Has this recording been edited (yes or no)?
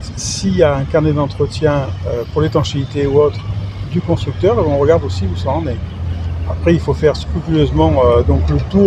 no